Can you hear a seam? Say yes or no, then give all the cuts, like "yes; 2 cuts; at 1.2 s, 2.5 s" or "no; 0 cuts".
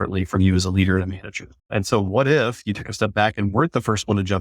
yes; 1 cut; at 1.5 s